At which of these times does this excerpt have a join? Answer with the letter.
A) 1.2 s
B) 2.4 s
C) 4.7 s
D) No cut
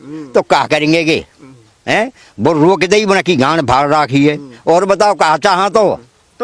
D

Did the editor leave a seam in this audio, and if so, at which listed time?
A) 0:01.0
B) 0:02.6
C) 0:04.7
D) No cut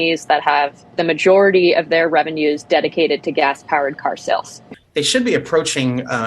C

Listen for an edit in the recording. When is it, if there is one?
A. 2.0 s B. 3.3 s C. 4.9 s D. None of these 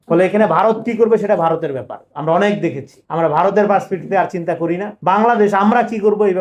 D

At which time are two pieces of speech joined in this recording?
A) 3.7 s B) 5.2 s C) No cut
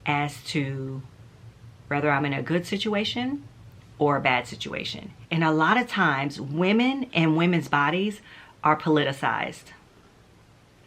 B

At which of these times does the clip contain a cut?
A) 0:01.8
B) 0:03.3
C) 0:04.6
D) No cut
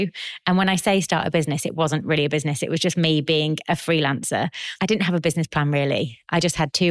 C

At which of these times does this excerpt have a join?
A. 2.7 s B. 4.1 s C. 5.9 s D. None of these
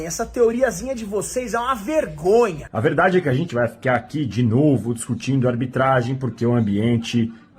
A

